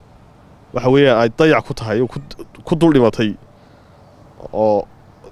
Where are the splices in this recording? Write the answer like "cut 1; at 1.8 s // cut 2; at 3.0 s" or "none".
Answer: none